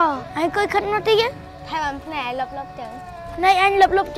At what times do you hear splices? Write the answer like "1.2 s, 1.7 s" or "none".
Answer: 1.5 s